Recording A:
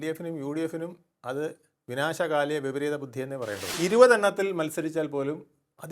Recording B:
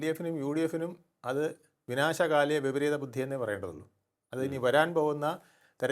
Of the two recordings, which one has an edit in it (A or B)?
A